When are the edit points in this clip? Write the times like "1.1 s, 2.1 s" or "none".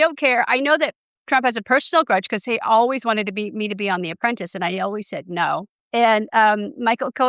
6.0 s